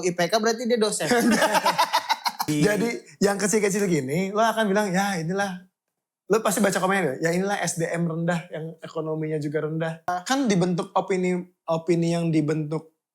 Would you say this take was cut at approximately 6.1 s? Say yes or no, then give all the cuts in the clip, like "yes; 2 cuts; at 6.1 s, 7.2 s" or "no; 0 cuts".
no; 2 cuts; at 2.4 s, 10.1 s